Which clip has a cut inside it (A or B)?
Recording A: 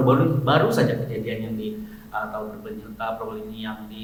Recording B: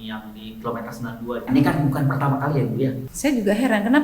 B